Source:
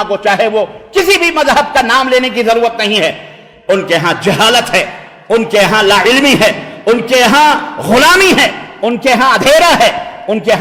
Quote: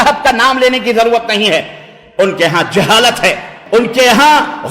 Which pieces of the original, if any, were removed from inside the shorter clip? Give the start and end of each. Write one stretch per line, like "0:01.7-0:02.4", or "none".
0:05.0-0:06.7